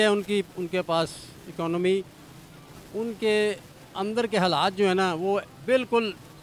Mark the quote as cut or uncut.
uncut